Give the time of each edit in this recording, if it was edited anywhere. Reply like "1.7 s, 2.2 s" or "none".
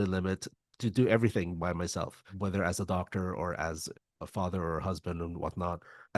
3.9 s

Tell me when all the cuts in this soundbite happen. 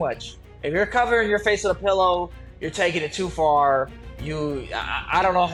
none

